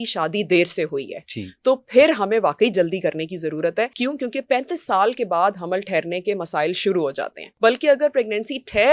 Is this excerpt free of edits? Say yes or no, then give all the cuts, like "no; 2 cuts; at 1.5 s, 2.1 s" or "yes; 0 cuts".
no; 2 cuts; at 3.9 s, 7.4 s